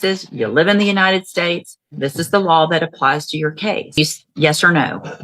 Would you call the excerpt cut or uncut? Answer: cut